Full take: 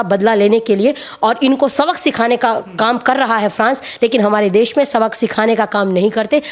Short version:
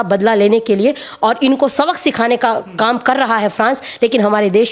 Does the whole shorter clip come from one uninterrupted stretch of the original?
yes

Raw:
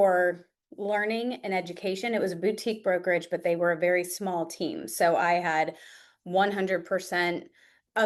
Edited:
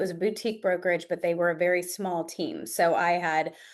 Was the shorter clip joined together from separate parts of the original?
no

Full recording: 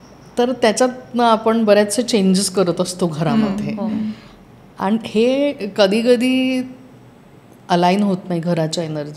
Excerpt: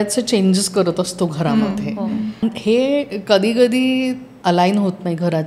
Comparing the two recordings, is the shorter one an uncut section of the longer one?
no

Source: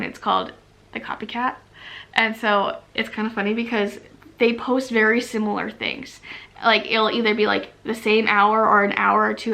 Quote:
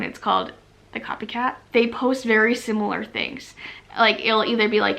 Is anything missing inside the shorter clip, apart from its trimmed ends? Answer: yes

